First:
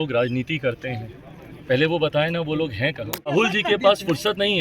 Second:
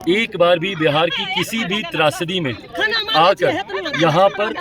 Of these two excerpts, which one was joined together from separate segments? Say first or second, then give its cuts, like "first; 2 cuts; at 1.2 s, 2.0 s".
first; 1 cut; at 3.3 s